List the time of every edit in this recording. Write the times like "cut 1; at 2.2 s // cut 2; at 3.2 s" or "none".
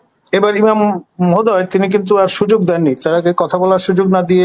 none